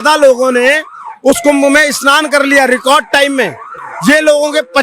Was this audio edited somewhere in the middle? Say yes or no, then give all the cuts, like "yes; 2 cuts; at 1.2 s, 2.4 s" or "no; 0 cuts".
no; 0 cuts